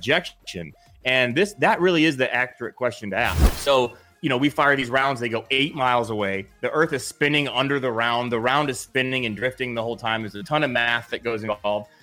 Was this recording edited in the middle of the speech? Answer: yes; 1 cut; at 3.4 s

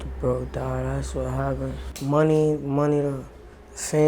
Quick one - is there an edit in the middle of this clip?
yes; 1 cut; at 1.9 s

